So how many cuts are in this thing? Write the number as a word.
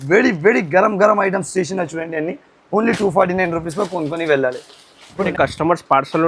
one